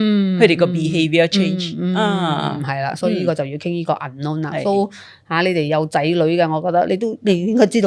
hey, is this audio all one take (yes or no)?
yes